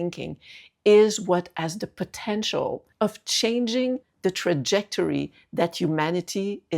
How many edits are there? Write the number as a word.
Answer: two